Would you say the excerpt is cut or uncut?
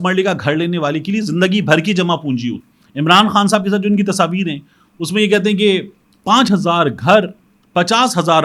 cut